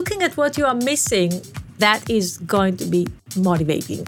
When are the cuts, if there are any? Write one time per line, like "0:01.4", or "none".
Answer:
0:01.8
0:03.2